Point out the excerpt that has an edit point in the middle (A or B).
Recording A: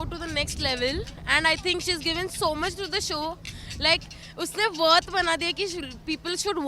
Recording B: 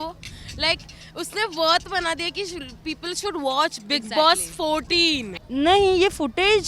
B